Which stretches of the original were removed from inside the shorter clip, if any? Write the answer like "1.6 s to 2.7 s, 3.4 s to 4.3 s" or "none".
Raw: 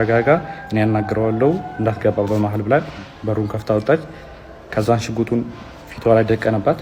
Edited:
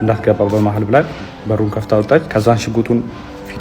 4.0 s to 4.7 s